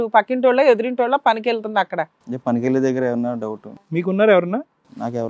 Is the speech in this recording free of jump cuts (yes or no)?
no